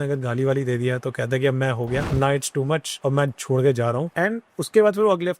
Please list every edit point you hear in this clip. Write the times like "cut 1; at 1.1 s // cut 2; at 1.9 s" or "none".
cut 1; at 2.1 s // cut 2; at 2.9 s // cut 3; at 4.1 s